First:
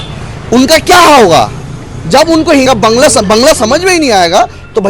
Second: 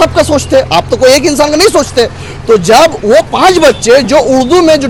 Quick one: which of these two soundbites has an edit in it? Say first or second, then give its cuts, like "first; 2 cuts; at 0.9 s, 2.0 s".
first; 1 cut; at 2.7 s